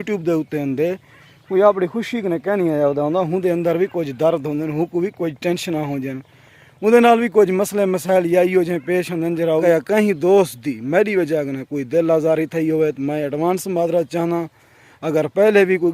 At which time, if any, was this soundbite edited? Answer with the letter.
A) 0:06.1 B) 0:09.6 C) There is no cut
B